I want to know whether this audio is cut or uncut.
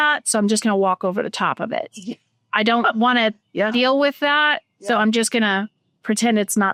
uncut